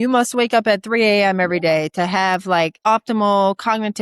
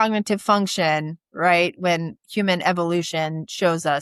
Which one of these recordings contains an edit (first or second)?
first